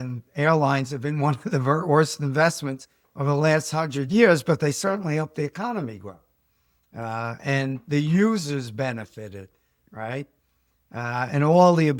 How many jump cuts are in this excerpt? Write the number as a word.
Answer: zero